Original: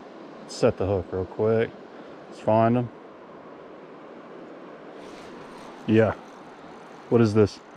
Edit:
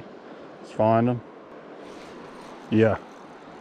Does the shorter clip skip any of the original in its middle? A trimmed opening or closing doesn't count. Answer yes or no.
yes